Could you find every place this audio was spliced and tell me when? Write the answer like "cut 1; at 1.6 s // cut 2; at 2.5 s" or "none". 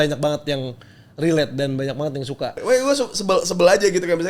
cut 1; at 2.6 s